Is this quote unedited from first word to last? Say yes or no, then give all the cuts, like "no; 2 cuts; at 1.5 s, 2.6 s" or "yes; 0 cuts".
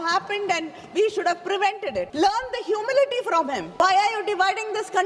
no; 2 cuts; at 2.1 s, 3.8 s